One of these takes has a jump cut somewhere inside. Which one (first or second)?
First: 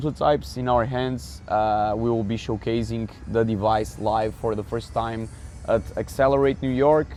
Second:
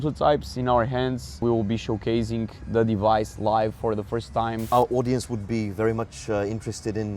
second